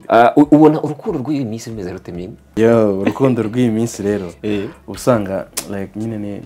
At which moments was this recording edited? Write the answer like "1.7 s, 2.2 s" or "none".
2.4 s